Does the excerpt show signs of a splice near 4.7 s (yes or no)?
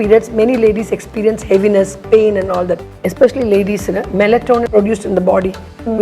yes